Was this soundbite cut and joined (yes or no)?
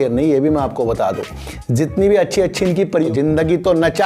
yes